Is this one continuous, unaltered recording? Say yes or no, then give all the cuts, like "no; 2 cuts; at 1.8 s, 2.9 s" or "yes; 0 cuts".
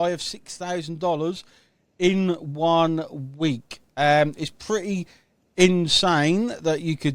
yes; 0 cuts